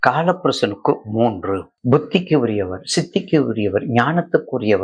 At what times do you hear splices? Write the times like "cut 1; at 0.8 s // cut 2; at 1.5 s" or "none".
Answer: cut 1; at 1.6 s

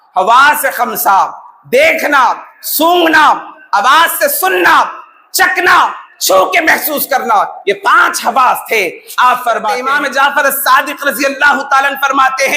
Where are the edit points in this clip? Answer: cut 1; at 9.8 s

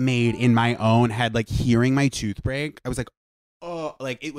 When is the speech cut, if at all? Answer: none

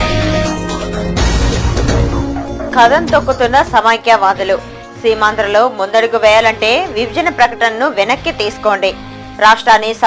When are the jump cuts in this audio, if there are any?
cut 1; at 1.9 s

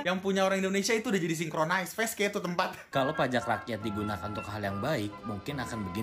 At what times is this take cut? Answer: cut 1; at 2.9 s

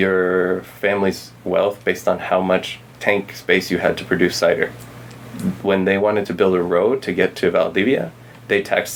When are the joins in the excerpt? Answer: none

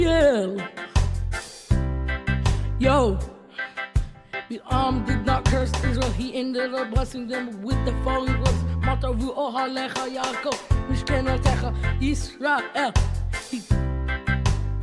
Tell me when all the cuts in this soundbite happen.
none

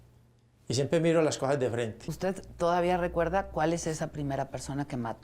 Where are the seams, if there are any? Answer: cut 1; at 2.1 s

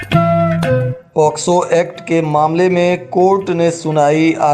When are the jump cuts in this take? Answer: cut 1; at 0.9 s

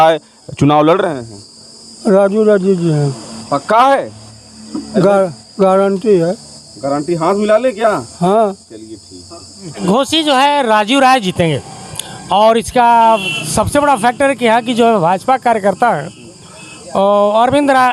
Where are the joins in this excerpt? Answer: cut 1; at 9.8 s

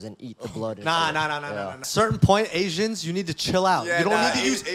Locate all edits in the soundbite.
cut 1; at 1.8 s

